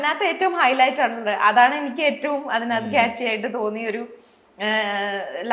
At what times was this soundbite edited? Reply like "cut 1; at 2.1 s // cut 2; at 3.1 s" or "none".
none